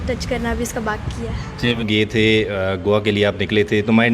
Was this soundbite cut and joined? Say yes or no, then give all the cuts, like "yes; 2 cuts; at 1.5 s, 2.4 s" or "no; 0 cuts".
yes; 1 cut; at 1.8 s